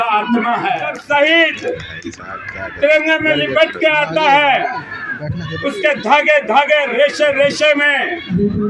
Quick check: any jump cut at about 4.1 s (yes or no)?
no